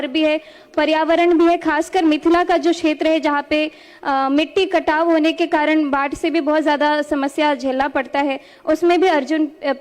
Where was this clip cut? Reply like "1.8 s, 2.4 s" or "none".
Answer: none